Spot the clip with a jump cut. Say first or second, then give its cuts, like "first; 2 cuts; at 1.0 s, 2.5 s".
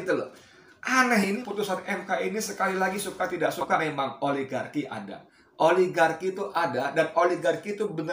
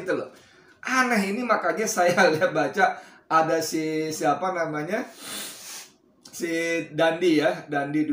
first; 2 cuts; at 1.4 s, 3.8 s